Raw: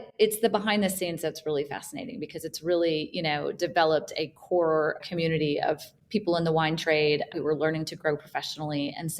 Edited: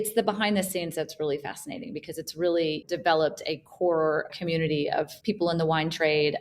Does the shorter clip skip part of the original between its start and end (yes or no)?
yes